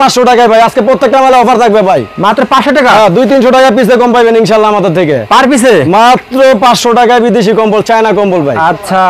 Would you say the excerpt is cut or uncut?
uncut